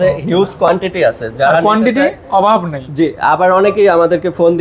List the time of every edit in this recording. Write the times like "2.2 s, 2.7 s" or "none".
none